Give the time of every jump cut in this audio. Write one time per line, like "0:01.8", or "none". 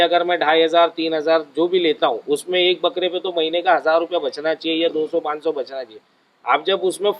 none